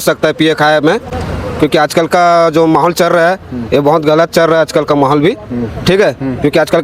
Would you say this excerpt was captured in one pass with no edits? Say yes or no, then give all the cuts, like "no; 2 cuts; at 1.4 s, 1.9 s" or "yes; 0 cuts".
yes; 0 cuts